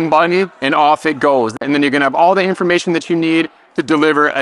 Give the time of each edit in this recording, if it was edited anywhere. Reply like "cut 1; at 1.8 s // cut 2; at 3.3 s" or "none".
cut 1; at 1.6 s